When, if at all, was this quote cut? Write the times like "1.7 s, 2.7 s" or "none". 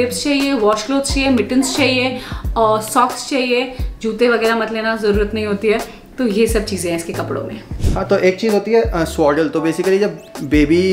none